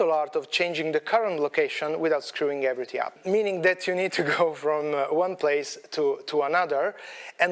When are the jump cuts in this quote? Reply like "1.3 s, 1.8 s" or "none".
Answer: 3.2 s

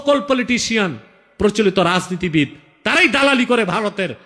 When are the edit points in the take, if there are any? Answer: none

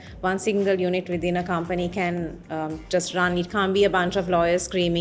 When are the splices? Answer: none

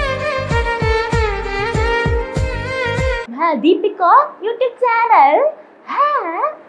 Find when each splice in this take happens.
3.2 s

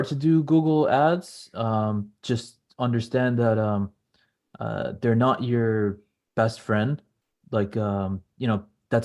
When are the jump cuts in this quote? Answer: none

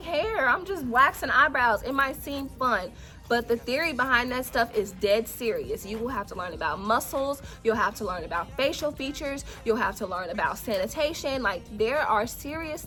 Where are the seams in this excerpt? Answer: none

